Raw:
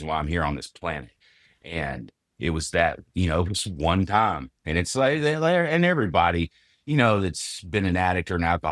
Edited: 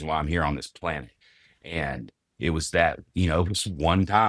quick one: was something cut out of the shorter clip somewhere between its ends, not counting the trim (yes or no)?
no